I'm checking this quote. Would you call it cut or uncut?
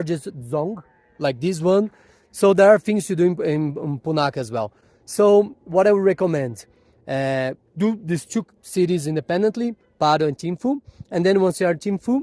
uncut